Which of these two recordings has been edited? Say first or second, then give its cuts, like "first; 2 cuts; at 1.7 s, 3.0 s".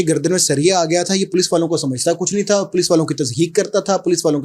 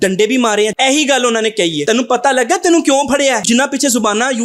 second; 3 cuts; at 0.7 s, 1.8 s, 3.4 s